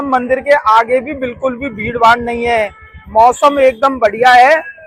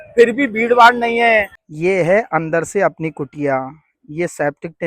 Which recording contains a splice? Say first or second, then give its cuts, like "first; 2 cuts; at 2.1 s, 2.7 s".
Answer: second; 1 cut; at 1.6 s